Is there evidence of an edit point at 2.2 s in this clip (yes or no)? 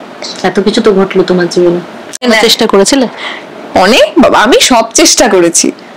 yes